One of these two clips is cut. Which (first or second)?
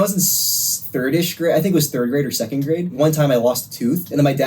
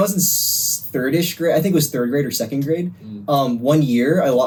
first